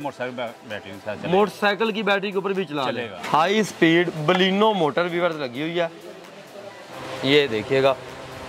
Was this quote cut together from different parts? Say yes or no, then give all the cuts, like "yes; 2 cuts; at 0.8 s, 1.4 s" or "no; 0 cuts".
yes; 2 cuts; at 3.2 s, 6.9 s